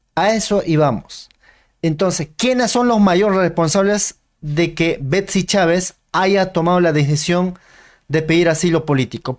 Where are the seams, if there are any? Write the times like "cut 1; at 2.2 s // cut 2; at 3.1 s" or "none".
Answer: none